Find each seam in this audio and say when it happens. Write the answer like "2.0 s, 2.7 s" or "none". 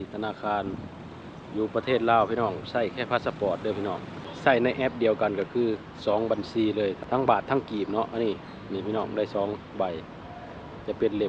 4.3 s, 7.0 s